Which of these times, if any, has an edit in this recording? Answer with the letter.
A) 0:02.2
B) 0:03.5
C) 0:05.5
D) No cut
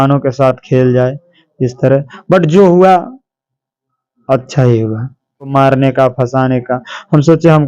C